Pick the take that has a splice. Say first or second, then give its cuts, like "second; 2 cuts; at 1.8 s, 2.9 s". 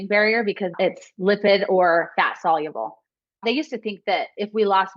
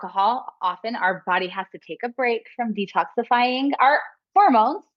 first; 2 cuts; at 0.7 s, 3.4 s